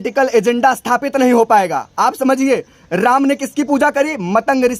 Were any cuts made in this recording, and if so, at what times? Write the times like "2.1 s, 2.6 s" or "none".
none